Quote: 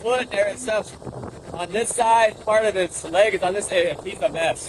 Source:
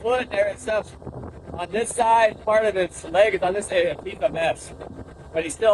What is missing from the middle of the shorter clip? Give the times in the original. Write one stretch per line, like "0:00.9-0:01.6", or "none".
none